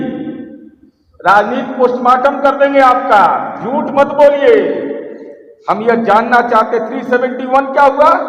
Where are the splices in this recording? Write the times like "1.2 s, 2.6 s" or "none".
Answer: none